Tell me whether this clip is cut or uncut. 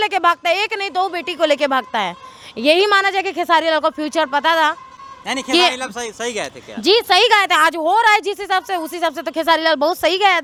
uncut